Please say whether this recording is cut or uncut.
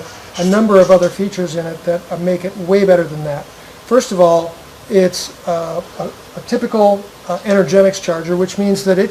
uncut